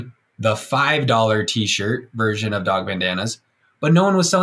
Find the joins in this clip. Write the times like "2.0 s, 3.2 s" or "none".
none